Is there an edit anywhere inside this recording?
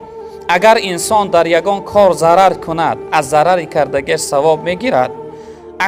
no; 0 cuts

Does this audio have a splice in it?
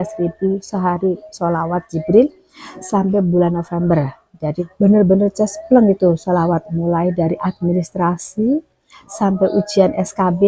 yes; 1 cut; at 4.6 s

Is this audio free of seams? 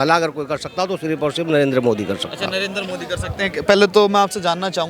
yes; 0 cuts

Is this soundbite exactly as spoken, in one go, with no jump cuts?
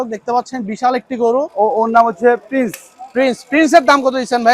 no; 1 cut; at 1.5 s

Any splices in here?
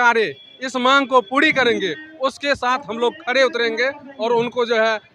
no; 0 cuts

